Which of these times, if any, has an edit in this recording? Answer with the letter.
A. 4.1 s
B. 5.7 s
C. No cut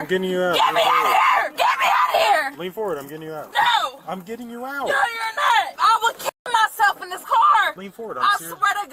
B